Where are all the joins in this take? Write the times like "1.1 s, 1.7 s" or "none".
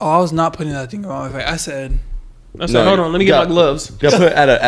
none